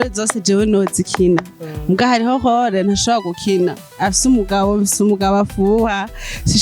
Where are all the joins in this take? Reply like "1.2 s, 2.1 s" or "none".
3.8 s